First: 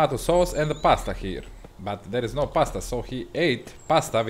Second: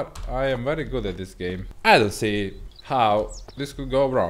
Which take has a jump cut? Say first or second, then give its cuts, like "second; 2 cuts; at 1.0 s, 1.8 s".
second; 1 cut; at 1.7 s